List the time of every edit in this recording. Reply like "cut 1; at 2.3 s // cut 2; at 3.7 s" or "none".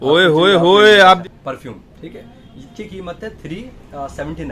cut 1; at 1.2 s